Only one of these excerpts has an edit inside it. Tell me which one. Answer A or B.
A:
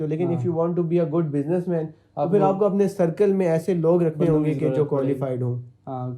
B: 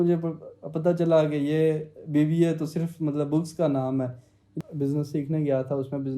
B